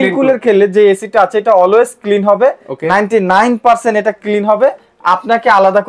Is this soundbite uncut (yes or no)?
yes